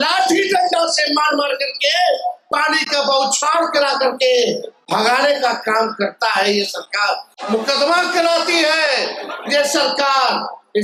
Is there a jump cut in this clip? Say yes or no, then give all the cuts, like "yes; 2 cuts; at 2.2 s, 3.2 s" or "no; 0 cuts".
no; 0 cuts